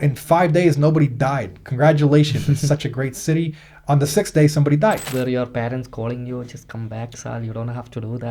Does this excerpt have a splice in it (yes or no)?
yes